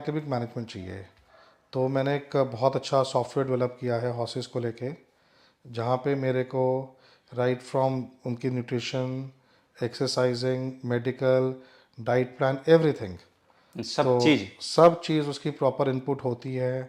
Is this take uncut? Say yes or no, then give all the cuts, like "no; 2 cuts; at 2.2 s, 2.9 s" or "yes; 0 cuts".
yes; 0 cuts